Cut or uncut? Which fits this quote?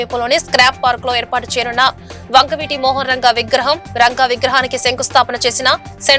uncut